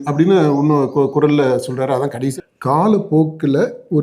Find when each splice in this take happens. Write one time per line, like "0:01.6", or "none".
0:02.3